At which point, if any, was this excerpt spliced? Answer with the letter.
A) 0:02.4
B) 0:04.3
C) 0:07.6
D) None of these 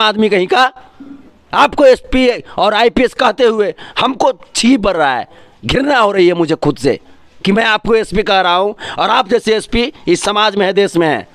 D